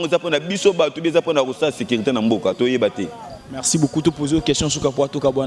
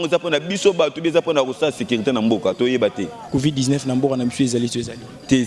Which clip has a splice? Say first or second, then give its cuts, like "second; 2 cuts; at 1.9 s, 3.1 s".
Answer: second; 1 cut; at 3.1 s